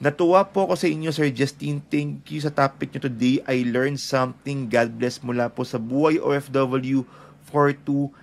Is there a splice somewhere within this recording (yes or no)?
no